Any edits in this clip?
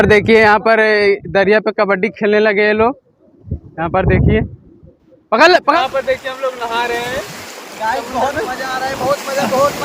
yes; 1 cut; at 5.8 s

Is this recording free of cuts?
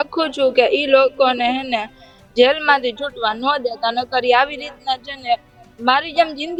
yes; 0 cuts

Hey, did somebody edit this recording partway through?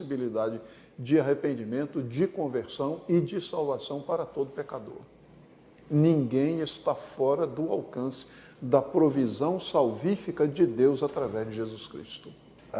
no; 0 cuts

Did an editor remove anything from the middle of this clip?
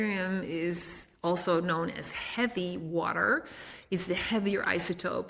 no; 0 cuts

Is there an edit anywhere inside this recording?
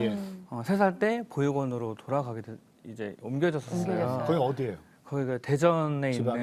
no; 0 cuts

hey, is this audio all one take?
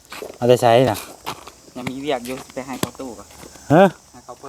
yes; 0 cuts

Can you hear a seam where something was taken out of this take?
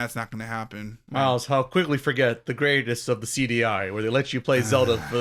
no; 0 cuts

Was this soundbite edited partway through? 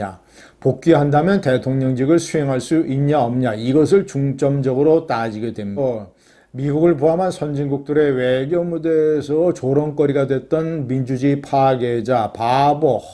yes; 1 cut; at 5.8 s

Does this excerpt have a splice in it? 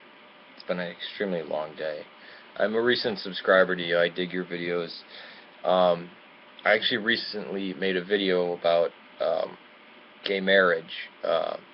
yes; 1 cut; at 6.4 s

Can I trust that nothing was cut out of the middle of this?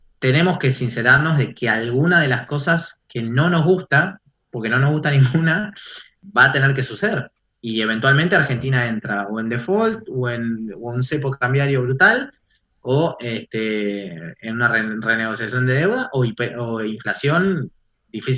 no; 1 cut; at 6.1 s

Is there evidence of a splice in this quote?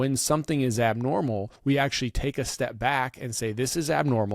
yes; 1 cut; at 1.5 s

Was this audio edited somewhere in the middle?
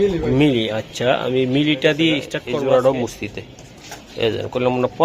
yes; 1 cut; at 2.2 s

